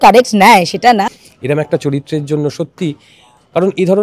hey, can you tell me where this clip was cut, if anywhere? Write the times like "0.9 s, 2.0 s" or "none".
1.1 s